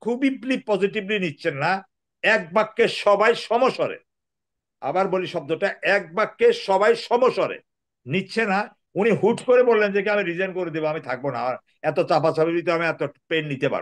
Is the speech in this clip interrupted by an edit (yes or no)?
yes